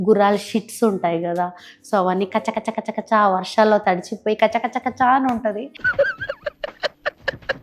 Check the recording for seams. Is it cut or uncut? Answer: uncut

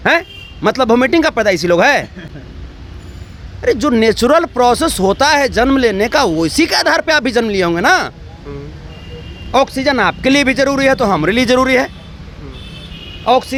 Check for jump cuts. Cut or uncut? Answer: uncut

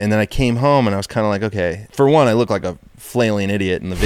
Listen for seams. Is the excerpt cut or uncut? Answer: cut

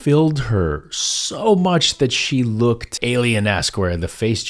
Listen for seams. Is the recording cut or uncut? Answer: cut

